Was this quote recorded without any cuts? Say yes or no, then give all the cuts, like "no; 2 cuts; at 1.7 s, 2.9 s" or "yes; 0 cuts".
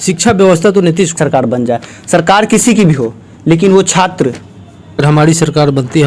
no; 2 cuts; at 1.2 s, 5.0 s